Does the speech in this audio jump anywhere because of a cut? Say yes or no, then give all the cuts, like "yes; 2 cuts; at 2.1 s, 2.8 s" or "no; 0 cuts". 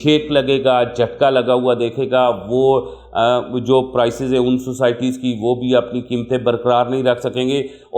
no; 0 cuts